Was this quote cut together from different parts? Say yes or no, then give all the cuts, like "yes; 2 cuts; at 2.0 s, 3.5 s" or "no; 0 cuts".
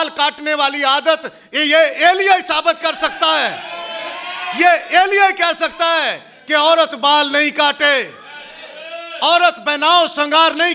no; 0 cuts